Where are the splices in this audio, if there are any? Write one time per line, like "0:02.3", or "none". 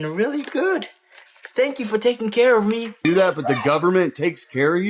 0:02.9